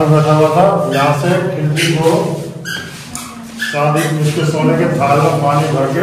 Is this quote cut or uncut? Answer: uncut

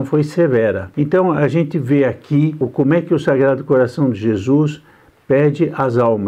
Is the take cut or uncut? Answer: cut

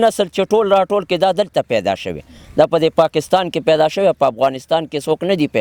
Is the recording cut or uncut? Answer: uncut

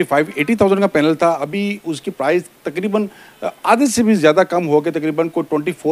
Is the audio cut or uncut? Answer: uncut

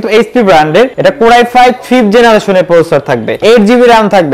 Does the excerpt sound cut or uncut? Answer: cut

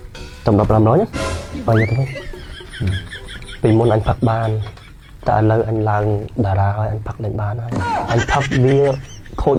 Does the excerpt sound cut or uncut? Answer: uncut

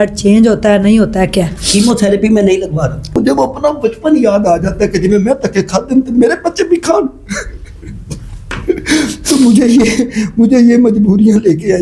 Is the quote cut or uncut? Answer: cut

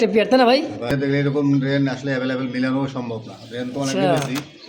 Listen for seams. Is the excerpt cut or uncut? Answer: cut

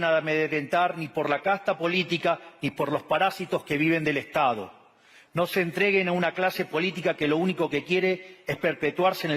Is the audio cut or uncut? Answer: uncut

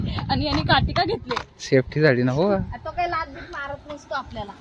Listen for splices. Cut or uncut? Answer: uncut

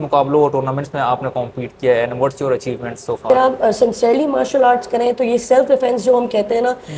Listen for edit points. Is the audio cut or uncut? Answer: cut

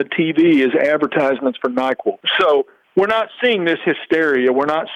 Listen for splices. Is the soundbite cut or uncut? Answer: uncut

